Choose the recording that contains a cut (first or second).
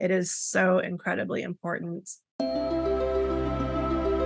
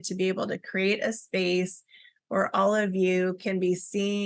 first